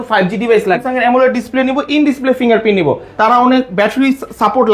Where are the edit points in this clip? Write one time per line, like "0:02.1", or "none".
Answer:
0:00.8
0:03.1